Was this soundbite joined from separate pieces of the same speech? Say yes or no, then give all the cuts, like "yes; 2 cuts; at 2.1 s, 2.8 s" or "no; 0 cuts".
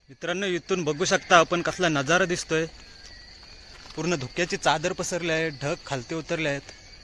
no; 0 cuts